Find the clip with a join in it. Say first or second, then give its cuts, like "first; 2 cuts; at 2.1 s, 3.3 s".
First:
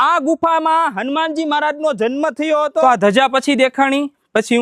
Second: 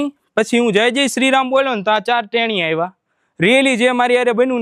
first; 1 cut; at 2.8 s